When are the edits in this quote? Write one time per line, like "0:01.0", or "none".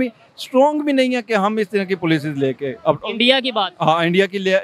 none